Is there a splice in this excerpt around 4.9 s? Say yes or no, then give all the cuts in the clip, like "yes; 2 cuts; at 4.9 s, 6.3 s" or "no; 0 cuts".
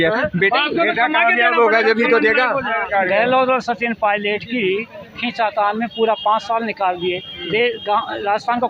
no; 1 cut; at 2.9 s